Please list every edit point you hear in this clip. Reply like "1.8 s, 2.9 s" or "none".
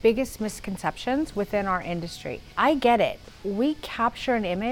2.4 s